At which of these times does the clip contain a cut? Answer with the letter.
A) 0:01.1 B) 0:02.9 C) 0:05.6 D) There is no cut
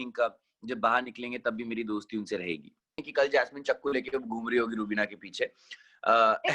B